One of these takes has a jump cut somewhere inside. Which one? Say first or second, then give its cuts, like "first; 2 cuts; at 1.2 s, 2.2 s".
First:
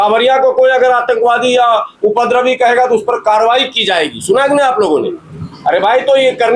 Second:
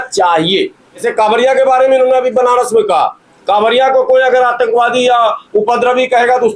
second; 1 cut; at 1.1 s